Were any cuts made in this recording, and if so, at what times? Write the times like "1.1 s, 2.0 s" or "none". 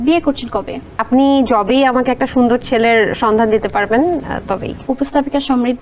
1.0 s, 4.8 s